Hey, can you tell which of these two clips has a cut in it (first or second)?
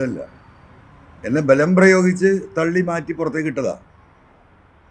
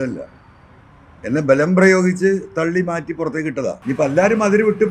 second